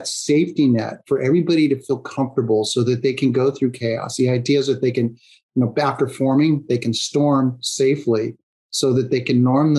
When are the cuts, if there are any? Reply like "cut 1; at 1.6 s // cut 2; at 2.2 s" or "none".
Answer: none